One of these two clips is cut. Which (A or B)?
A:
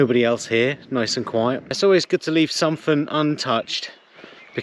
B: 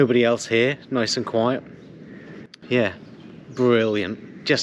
A